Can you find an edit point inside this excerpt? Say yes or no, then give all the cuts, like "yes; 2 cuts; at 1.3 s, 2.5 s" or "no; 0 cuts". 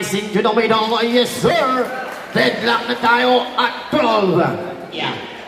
no; 0 cuts